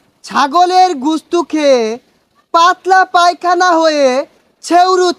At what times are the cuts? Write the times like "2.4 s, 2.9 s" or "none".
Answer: none